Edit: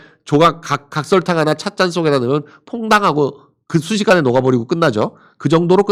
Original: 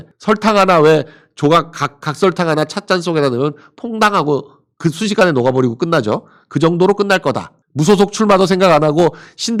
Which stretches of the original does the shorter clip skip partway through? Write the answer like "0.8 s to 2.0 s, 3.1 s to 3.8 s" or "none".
none